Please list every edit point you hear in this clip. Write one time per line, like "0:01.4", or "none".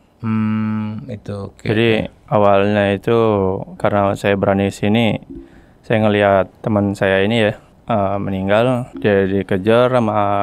0:06.6
0:07.7
0:08.9